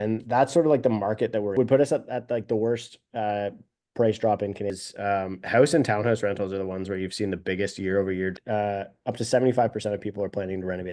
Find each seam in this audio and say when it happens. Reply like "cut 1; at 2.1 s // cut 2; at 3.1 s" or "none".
cut 1; at 1.5 s // cut 2; at 4.7 s // cut 3; at 8.4 s